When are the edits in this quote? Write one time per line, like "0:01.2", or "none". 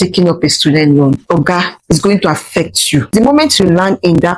0:03.1